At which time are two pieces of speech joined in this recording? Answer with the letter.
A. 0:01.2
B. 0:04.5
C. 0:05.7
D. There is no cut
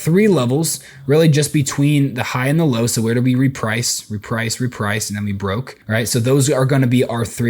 C